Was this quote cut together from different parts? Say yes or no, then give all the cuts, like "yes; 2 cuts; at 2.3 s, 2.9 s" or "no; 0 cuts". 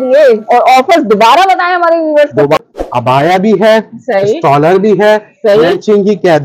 yes; 1 cut; at 2.7 s